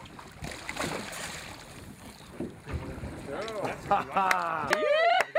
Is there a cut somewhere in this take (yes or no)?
no